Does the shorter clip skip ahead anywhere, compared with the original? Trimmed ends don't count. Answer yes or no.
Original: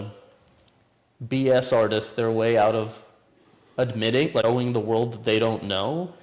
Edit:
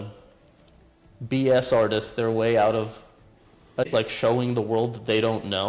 yes